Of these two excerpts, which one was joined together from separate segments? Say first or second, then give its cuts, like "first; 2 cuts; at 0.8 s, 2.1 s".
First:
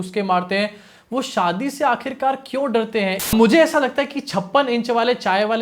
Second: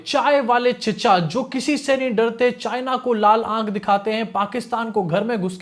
first; 1 cut; at 3.2 s